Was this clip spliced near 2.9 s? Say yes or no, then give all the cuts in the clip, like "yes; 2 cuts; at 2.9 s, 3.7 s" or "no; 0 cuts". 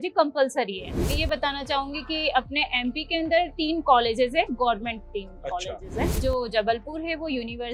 no; 2 cuts; at 0.9 s, 6.1 s